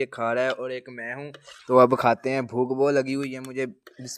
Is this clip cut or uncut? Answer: uncut